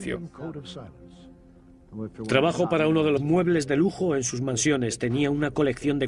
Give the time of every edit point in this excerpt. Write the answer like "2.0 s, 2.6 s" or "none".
none